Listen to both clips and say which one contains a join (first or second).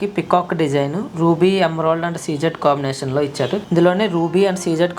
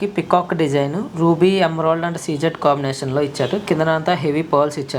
first